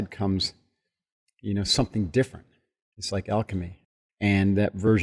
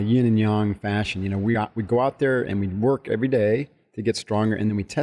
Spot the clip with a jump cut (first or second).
first